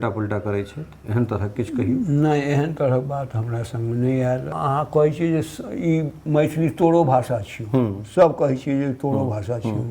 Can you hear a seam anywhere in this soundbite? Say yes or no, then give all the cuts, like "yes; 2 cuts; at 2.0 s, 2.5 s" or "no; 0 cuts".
yes; 1 cut; at 4.5 s